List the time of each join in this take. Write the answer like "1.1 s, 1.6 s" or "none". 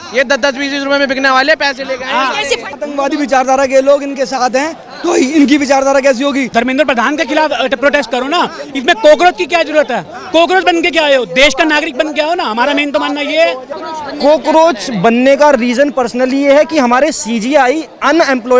2.8 s, 6.5 s, 10.1 s, 13.7 s